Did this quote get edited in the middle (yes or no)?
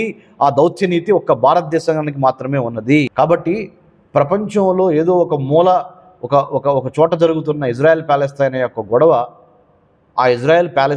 yes